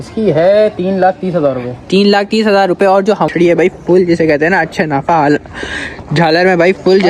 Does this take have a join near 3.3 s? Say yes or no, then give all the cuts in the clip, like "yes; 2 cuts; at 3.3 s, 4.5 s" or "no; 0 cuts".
yes; 1 cut; at 3.3 s